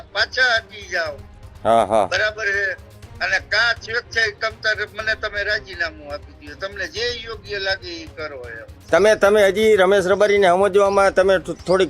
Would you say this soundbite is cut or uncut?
cut